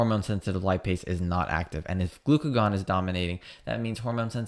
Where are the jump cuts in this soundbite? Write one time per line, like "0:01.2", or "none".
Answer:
none